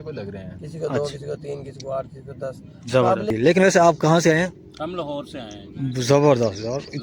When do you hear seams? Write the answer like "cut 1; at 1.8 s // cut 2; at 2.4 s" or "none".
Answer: cut 1; at 3.3 s